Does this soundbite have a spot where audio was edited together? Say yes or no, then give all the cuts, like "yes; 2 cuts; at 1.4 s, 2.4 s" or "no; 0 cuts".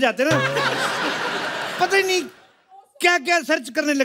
no; 0 cuts